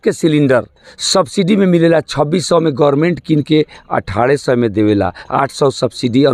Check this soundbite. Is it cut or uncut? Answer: uncut